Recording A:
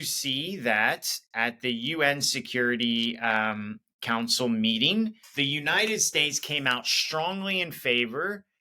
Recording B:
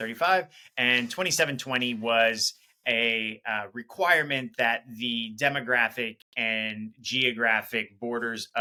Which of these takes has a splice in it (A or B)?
A